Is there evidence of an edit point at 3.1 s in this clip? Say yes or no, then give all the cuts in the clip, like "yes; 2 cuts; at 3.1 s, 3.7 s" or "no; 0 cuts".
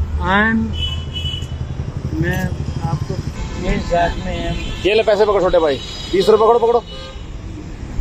yes; 1 cut; at 3.1 s